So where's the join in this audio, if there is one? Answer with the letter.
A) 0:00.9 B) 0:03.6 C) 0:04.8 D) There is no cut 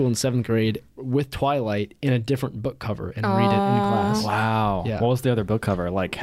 A